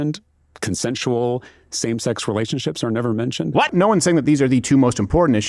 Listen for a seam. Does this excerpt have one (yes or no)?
yes